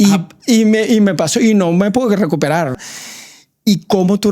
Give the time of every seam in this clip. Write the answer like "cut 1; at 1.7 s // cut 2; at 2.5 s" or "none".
cut 1; at 2.8 s